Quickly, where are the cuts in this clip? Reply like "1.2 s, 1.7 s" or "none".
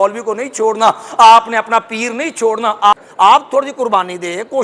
2.9 s